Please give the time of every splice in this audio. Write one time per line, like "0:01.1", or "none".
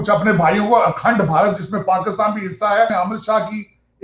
0:02.9